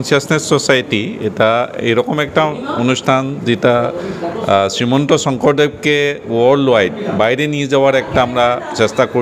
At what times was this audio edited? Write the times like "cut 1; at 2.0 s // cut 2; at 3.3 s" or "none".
none